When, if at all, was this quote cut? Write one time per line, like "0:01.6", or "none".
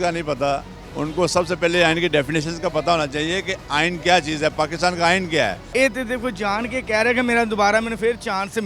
0:05.6